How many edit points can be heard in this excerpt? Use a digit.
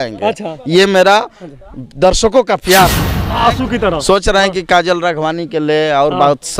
1